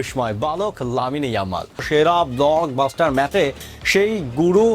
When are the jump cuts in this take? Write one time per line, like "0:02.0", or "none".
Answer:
0:01.8

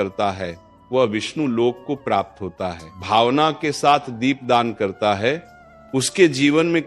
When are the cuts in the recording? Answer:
0:02.9

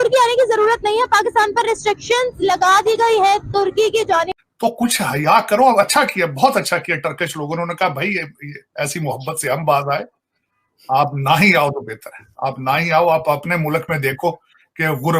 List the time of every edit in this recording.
0:04.4

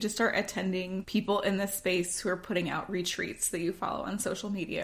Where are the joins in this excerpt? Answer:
none

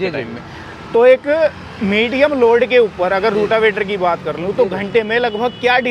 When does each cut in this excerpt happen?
none

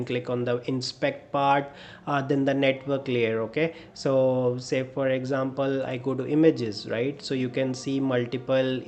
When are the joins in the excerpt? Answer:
none

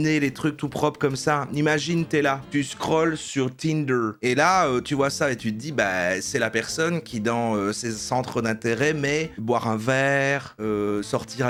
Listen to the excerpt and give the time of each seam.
none

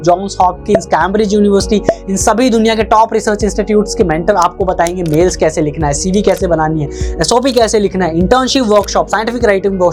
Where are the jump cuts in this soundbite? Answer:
none

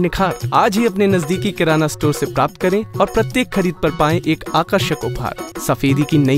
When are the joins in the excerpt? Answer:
0:05.4

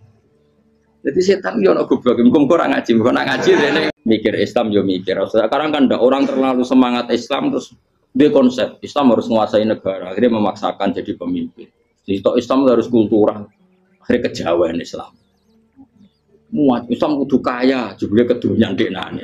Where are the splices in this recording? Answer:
0:03.9

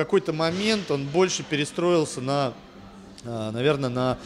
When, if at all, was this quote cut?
none

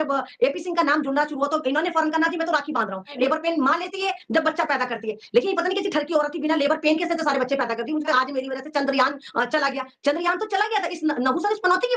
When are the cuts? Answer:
0:03.1
0:08.1

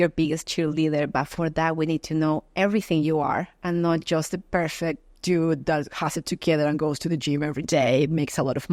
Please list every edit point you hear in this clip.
none

